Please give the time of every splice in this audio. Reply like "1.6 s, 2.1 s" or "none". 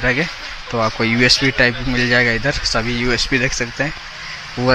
none